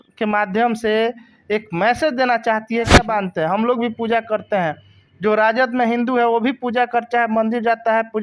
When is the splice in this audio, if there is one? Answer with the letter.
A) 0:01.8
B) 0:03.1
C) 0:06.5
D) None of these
B